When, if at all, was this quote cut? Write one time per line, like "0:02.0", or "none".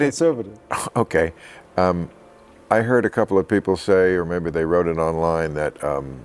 none